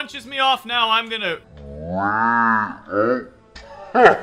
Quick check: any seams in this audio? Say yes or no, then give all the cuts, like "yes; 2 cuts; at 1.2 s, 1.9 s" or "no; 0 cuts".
no; 0 cuts